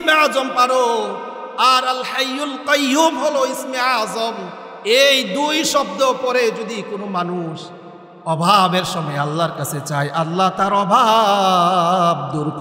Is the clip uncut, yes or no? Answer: yes